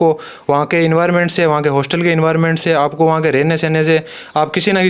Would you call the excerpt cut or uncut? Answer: uncut